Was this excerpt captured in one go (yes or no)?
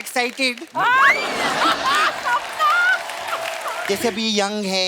no